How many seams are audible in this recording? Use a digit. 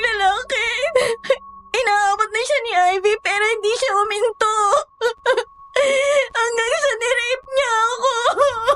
0